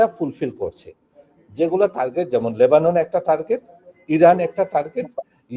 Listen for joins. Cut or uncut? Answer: uncut